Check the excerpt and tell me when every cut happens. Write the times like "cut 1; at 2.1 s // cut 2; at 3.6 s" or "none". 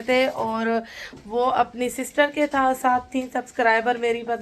cut 1; at 1.7 s

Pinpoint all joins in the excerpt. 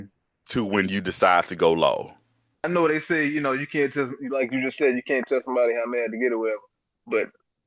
cut 1; at 2.7 s

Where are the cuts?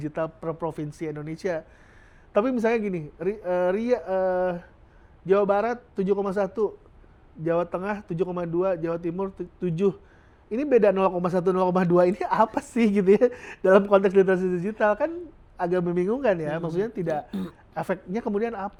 none

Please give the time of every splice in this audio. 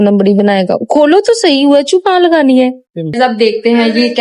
cut 1; at 3.1 s

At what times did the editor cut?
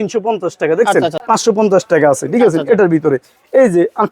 cut 1; at 1.2 s

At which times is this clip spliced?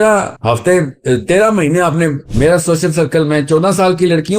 cut 1; at 2.3 s

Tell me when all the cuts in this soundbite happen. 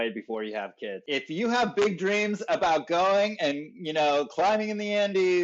cut 1; at 1.0 s

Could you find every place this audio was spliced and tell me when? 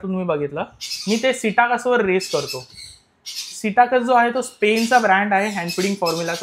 none

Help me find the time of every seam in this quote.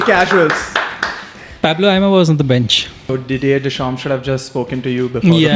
cut 1; at 3.0 s

